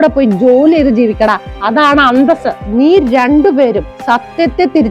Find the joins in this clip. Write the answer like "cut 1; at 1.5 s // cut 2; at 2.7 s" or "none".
cut 1; at 2.6 s